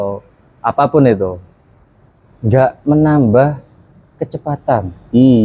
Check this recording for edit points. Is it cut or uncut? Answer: uncut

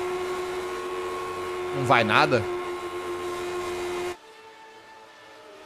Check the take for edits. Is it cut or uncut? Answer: uncut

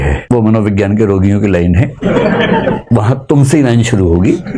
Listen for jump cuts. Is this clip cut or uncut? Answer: uncut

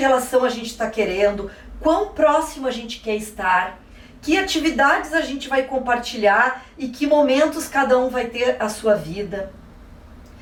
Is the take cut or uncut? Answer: uncut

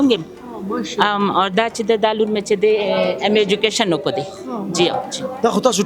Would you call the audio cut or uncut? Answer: uncut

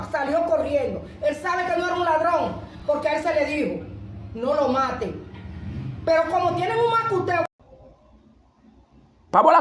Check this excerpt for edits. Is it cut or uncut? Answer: uncut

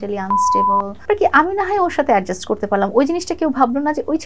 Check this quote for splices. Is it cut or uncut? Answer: cut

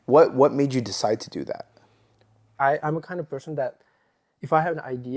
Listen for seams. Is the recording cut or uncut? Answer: cut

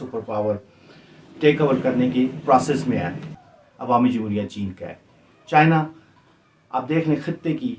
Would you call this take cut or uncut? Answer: cut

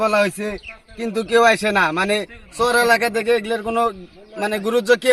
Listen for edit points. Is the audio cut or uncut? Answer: uncut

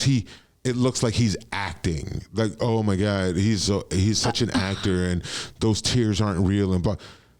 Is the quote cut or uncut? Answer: uncut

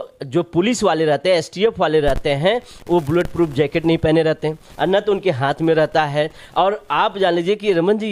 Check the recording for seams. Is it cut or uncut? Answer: uncut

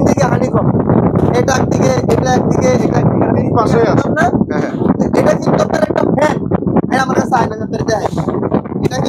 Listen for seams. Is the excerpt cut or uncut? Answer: uncut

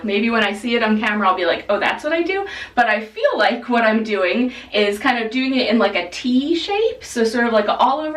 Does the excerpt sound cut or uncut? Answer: uncut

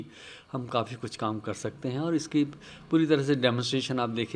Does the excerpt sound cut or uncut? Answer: uncut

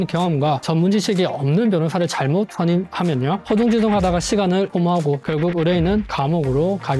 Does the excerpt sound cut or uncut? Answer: uncut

